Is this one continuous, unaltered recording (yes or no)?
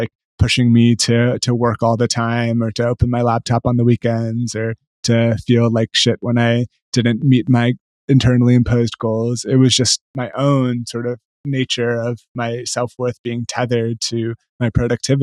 yes